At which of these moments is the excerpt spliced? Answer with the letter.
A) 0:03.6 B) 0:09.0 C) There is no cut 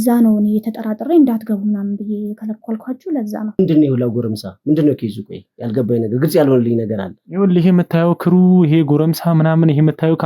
A